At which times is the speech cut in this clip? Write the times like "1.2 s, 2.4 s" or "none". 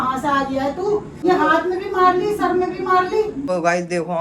1.2 s, 3.5 s